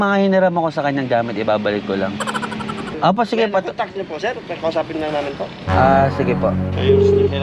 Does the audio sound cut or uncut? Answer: cut